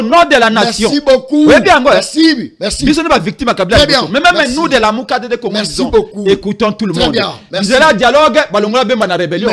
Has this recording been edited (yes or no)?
no